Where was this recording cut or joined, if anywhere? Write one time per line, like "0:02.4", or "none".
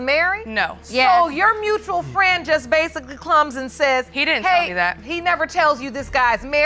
none